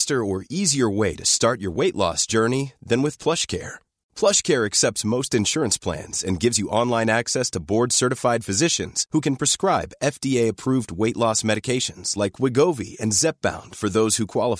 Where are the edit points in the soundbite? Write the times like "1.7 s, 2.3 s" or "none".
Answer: none